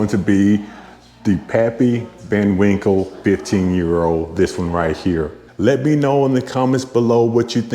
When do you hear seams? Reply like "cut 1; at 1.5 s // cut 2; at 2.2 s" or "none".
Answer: cut 1; at 5.4 s